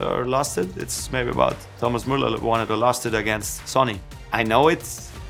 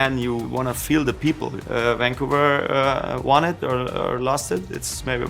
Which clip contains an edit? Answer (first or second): second